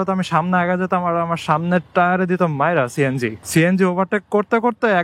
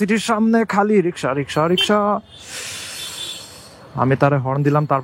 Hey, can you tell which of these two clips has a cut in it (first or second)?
first